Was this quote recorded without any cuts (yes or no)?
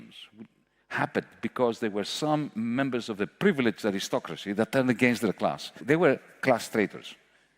no